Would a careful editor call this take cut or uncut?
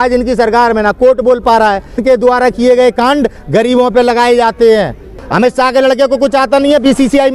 cut